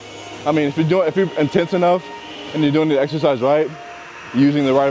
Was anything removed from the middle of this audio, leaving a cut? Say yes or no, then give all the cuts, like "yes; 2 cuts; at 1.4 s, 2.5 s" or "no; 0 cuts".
no; 0 cuts